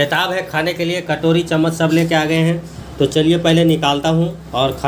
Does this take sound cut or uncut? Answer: uncut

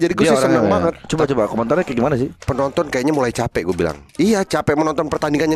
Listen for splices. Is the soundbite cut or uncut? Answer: cut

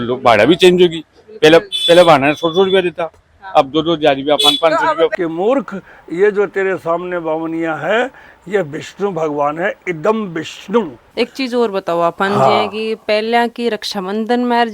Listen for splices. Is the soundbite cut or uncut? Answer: cut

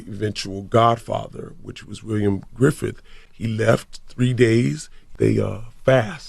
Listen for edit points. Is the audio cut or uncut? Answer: cut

